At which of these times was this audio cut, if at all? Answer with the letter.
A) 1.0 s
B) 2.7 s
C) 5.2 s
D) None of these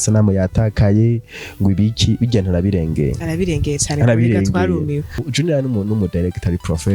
C